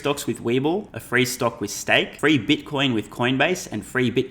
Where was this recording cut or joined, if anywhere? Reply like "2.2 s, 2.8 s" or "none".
1.0 s, 2.1 s

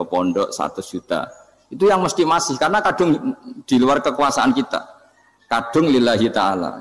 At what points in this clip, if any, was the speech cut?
none

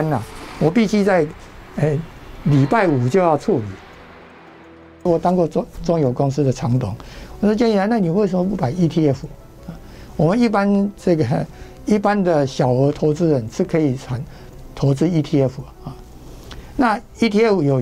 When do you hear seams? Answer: 4.7 s

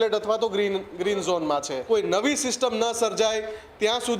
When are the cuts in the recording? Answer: 1.7 s

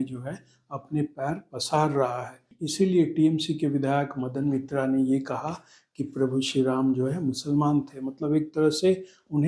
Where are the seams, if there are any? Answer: 2.5 s

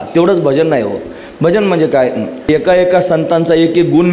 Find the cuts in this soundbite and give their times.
2.5 s

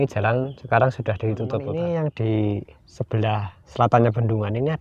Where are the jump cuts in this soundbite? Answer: 1.7 s

